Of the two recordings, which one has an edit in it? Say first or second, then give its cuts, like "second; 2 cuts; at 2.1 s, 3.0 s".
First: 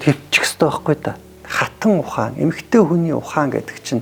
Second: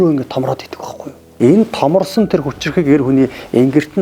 second; 1 cut; at 1.2 s